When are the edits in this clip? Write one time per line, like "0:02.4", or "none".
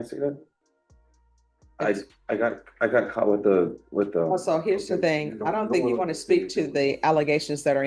none